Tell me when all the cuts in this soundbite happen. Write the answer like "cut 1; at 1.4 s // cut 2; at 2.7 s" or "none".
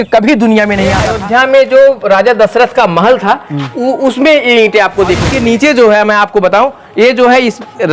cut 1; at 1.1 s // cut 2; at 5.2 s